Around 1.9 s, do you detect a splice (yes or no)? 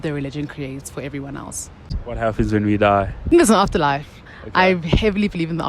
yes